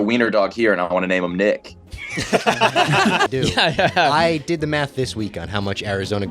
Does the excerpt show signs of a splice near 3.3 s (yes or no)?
yes